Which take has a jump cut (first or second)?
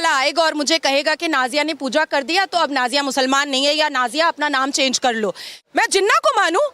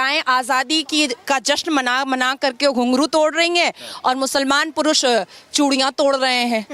first